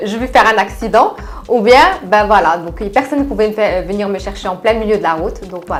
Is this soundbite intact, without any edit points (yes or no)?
yes